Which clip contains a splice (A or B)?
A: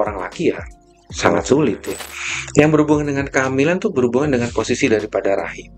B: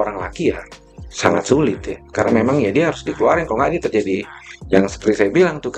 A